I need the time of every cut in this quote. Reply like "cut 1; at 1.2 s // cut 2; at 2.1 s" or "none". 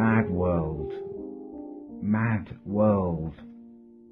none